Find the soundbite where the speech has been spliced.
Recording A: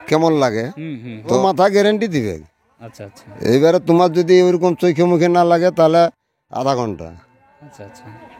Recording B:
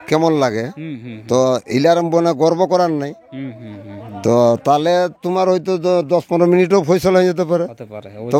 A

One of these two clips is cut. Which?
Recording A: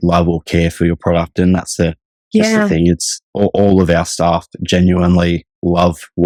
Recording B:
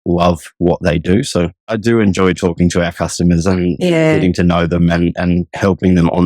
B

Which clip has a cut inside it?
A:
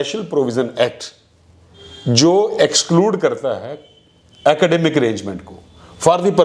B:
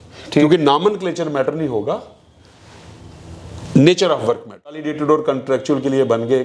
B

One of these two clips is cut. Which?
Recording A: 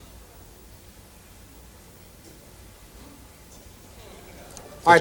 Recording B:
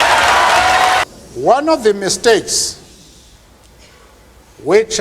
B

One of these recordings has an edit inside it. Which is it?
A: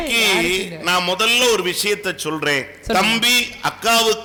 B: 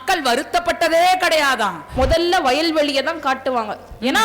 B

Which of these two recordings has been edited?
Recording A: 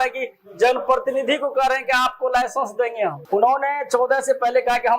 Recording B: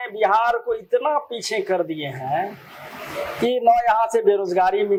A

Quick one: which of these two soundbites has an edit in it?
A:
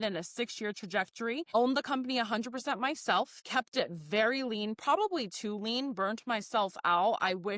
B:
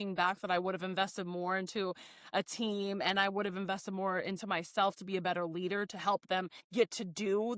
A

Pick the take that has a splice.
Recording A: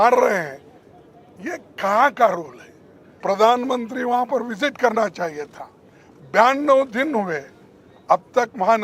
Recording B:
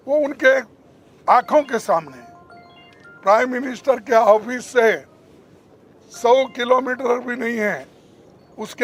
A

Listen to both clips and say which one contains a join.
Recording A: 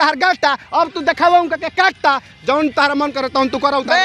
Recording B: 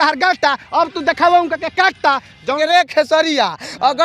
B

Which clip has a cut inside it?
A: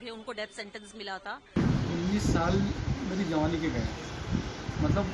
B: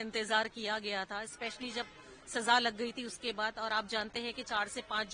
A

